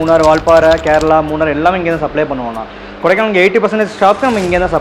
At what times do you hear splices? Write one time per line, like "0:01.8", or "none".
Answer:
none